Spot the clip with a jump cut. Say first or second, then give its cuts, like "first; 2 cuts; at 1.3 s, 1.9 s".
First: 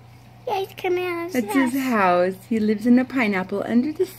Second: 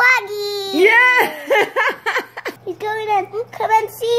second; 1 cut; at 2.5 s